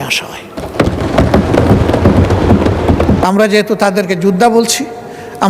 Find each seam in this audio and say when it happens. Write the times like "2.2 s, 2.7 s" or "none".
3.2 s